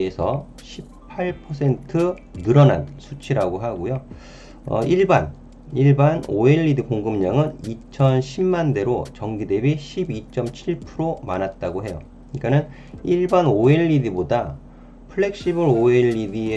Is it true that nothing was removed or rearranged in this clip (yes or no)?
yes